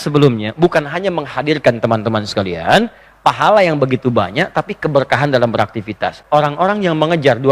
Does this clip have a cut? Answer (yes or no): yes